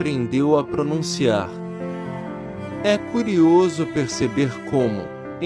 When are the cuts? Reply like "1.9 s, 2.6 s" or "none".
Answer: 1.4 s, 2.8 s